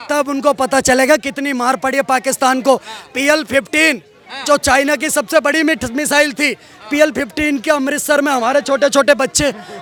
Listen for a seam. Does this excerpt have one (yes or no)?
no